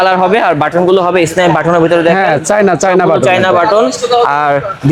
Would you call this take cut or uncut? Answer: uncut